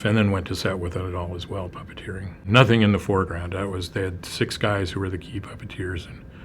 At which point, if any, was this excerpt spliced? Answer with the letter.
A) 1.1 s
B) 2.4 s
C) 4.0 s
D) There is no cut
B